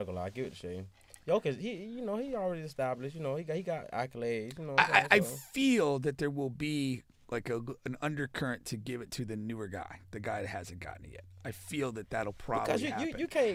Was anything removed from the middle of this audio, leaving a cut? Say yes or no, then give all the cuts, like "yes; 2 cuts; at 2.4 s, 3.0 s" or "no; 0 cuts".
no; 0 cuts